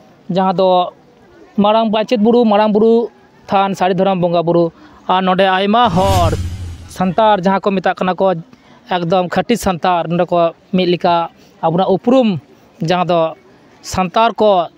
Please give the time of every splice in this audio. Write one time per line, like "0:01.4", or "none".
none